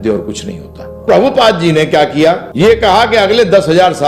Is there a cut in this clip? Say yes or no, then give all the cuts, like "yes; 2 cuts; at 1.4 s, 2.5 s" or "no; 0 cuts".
yes; 2 cuts; at 1.0 s, 2.5 s